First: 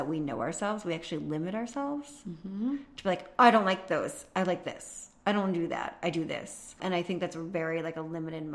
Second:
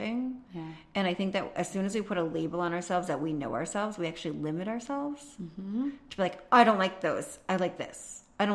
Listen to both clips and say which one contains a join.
first; 1 cut; at 6.8 s

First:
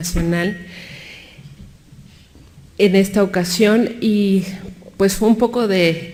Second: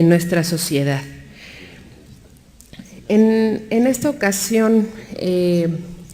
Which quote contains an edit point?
second; 1 cut; at 4.5 s

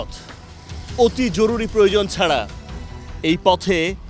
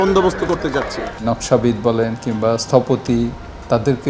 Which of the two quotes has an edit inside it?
second; 1 cut; at 1.2 s

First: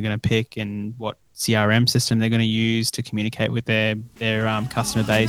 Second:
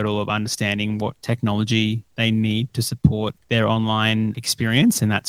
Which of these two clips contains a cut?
second; 4 cuts; at 1.2 s, 2.1 s, 3.4 s, 4.4 s

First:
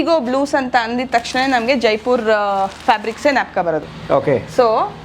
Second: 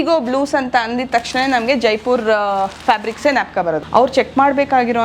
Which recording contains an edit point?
second; 1 cut; at 3.8 s

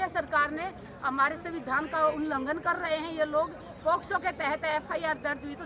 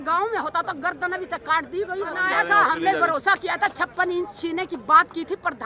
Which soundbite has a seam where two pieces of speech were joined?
second; 1 cut; at 2.2 s

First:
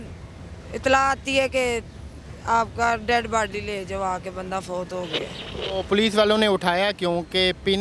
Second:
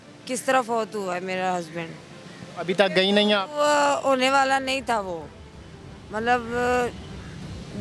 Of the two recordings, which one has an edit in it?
first; 1 cut; at 5.4 s

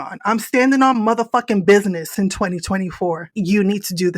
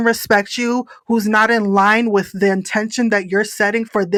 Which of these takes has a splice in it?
first; 1 cut; at 3.3 s

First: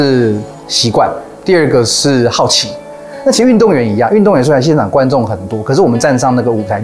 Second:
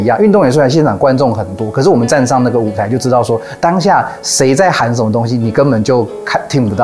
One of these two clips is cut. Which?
first; 1 cut; at 2.8 s

